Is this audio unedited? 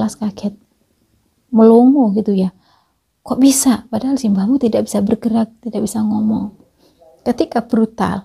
yes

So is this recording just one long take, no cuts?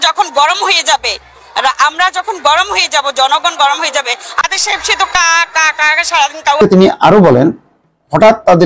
no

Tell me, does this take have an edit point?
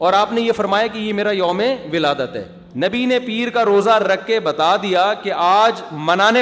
yes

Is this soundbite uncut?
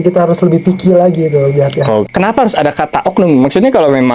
no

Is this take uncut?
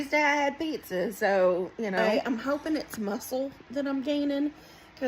no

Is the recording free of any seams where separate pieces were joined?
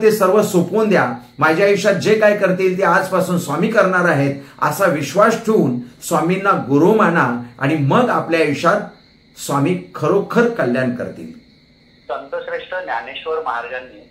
yes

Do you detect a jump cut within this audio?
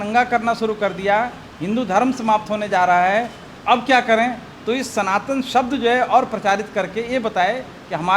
no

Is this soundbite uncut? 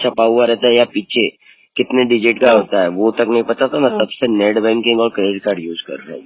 yes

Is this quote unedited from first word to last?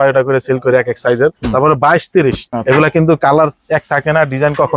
no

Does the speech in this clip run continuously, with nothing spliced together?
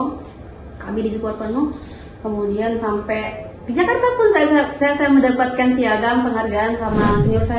yes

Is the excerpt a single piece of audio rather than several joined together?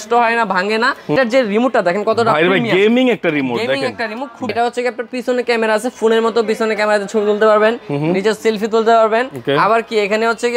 no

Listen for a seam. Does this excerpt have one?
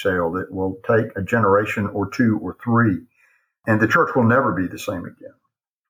yes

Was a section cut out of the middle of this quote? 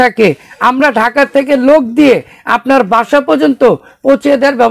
no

